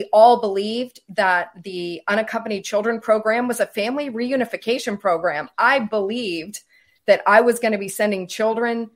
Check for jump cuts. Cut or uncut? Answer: uncut